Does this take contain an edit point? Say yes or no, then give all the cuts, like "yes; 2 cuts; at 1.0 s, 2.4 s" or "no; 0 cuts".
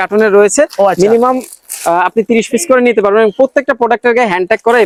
no; 0 cuts